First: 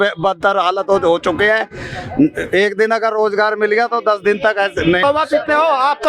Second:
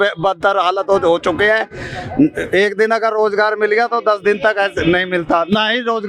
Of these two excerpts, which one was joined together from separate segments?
first; 1 cut; at 5.0 s

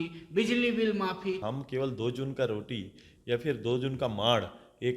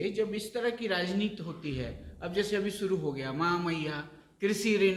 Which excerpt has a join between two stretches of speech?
first; 1 cut; at 1.4 s

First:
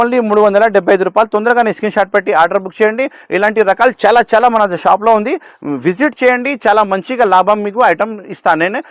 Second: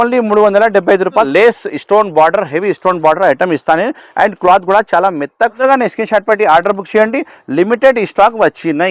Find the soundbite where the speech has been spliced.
second; 2 cuts; at 1.3 s, 5.6 s

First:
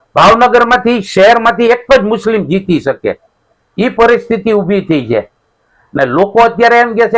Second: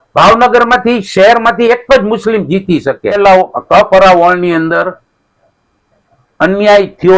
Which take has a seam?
second; 1 cut; at 3.2 s

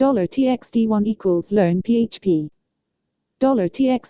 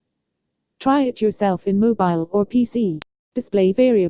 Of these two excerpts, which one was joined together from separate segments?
second; 1 cut; at 3.1 s

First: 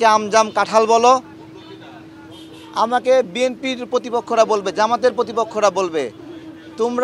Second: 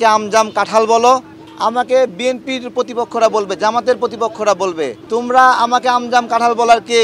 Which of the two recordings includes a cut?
second; 2 cuts; at 1.4 s, 5.0 s

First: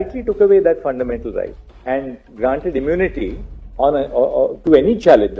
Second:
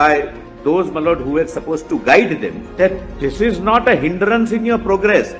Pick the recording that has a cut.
second; 1 cut; at 2.6 s

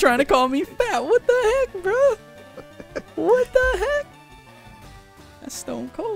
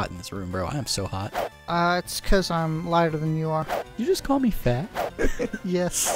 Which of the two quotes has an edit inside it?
second; 2 cuts; at 1.5 s, 3.8 s

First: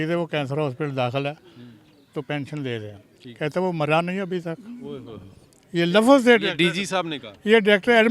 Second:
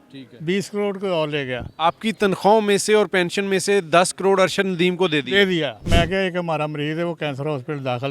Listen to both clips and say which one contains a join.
second; 1 cut; at 5.8 s

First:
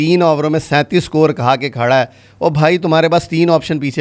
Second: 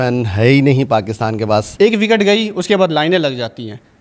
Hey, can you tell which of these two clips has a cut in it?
second; 1 cut; at 1.7 s

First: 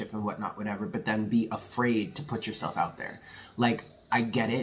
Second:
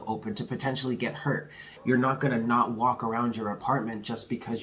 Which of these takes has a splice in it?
second; 1 cut; at 1.7 s

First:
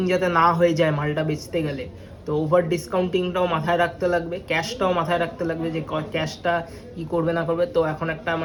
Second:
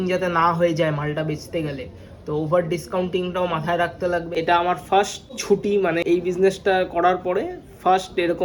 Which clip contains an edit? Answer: second; 2 cuts; at 4.3 s, 5.7 s

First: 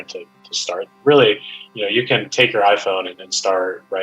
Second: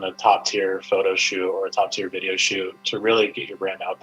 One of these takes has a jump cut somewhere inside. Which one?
first; 1 cut; at 0.9 s

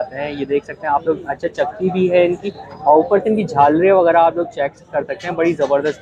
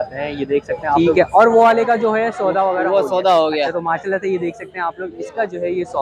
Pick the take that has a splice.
second; 1 cut; at 1.0 s

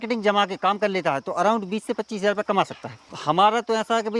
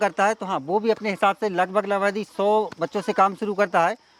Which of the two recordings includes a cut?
first; 1 cut; at 3.1 s

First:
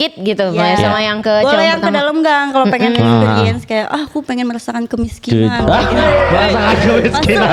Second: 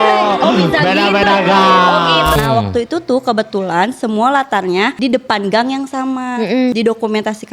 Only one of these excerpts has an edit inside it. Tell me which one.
second; 3 cuts; at 2.4 s, 4.9 s, 6.7 s

